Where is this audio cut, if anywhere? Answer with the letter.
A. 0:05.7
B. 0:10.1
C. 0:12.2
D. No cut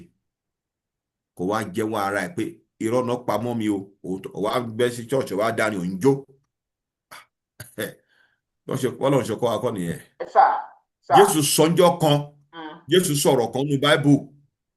D